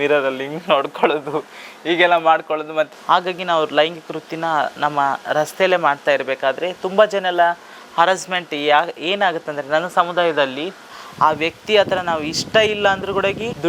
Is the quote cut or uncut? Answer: cut